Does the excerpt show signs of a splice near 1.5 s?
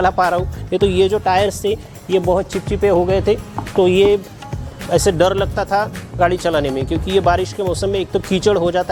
no; 0 cuts

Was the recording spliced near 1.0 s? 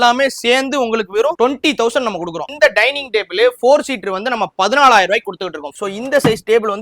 no; 2 cuts; at 2.5 s, 5.7 s

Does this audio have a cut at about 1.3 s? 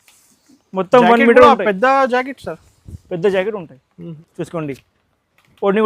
no; 1 cut; at 4.0 s

